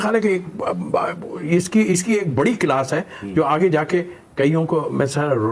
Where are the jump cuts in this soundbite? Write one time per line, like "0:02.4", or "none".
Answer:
none